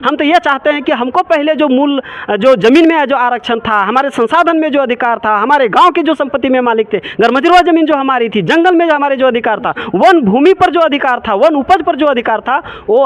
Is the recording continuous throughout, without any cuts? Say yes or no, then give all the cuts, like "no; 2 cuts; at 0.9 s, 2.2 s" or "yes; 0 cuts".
yes; 0 cuts